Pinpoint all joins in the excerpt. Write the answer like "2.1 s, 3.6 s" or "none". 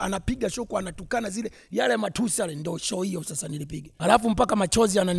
3.8 s